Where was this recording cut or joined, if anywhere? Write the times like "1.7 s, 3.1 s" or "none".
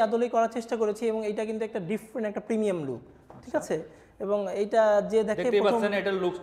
none